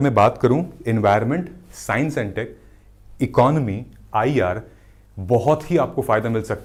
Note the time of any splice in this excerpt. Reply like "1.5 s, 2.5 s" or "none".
none